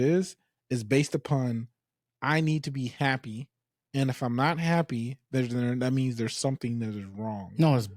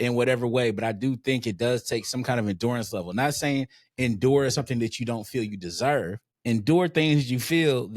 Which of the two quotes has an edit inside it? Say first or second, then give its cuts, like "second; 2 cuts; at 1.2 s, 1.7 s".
second; 1 cut; at 6.3 s